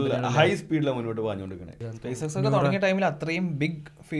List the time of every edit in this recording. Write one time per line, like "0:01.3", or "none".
0:01.9